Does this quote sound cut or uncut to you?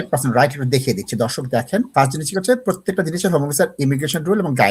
cut